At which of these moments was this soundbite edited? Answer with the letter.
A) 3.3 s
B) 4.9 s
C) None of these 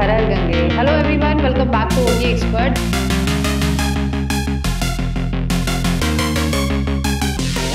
C